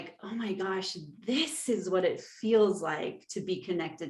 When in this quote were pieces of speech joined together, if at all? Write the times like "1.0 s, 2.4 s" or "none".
none